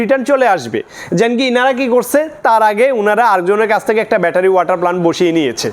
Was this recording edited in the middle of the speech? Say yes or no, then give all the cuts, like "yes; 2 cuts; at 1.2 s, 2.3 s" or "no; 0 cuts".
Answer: no; 0 cuts